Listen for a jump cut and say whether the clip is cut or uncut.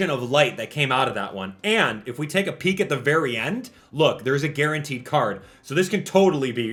uncut